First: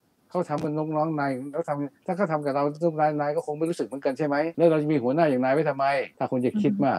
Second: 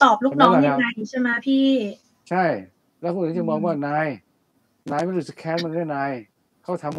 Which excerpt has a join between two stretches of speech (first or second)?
first